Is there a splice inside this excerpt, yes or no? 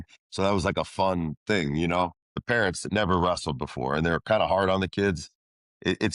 yes